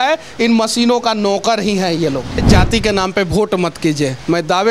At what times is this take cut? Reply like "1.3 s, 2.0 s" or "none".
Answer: 2.4 s